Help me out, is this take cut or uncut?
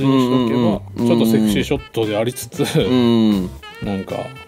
uncut